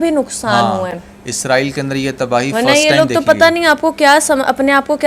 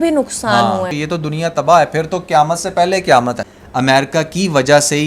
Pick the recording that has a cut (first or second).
second